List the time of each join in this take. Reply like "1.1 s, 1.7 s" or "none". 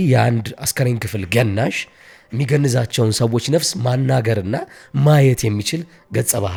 none